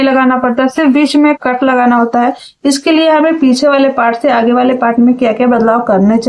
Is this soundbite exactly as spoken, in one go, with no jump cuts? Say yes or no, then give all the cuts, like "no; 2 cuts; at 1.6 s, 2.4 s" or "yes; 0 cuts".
yes; 0 cuts